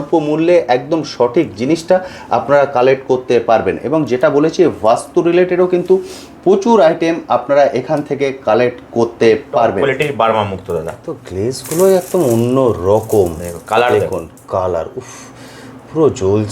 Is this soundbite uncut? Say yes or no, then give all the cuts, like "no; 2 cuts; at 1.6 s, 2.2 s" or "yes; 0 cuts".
no; 1 cut; at 9.8 s